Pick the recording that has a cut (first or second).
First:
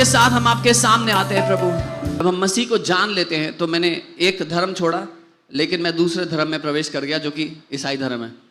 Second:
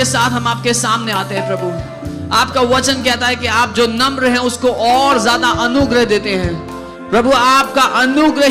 first